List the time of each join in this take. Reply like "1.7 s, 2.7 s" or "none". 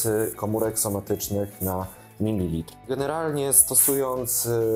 2.9 s